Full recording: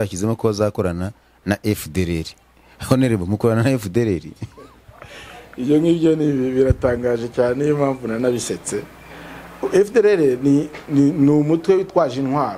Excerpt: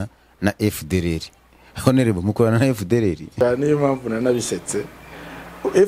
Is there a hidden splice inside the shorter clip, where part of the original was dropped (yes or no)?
yes